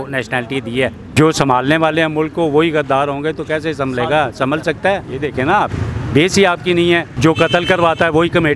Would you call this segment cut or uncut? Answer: cut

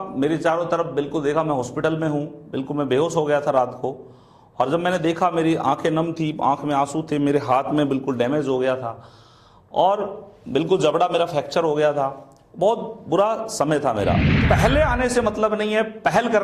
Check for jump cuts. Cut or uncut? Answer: cut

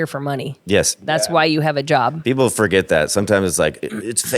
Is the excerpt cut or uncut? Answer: cut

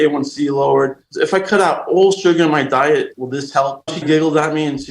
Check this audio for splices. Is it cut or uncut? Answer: cut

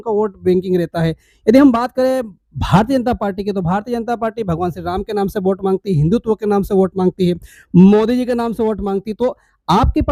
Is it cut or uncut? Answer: uncut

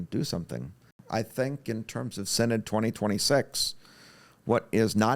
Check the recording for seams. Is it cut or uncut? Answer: cut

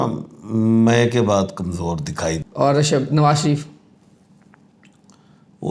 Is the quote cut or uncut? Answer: cut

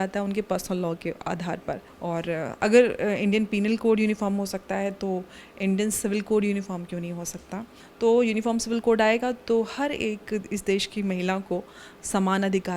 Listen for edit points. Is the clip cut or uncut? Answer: cut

